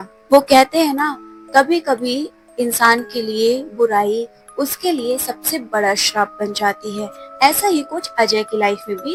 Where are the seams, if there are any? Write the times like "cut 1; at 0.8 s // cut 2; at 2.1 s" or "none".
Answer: none

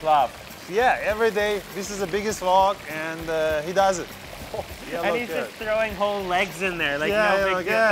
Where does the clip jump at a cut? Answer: none

